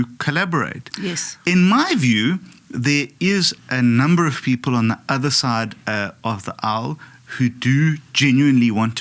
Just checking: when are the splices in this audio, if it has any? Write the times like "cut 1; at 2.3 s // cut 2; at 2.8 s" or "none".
none